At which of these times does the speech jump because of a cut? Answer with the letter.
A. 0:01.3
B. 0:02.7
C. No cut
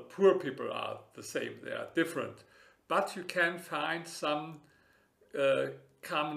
C